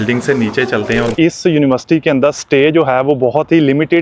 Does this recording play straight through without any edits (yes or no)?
no